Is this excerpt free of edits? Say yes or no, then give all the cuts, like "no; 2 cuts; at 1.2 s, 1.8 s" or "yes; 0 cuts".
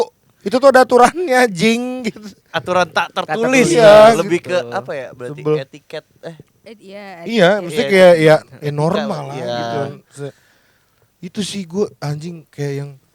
yes; 0 cuts